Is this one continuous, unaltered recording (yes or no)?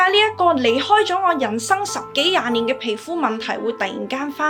yes